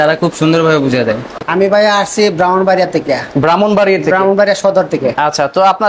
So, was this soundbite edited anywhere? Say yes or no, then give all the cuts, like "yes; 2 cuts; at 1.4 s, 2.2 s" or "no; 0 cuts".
no; 0 cuts